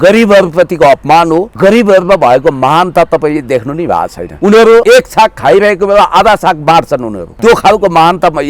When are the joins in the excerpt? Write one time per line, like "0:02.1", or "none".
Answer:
0:01.5
0:04.2
0:04.8
0:07.2